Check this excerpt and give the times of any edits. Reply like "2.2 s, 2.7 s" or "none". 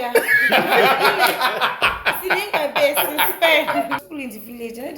4.1 s